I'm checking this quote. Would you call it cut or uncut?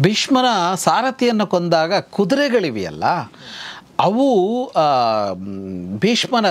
uncut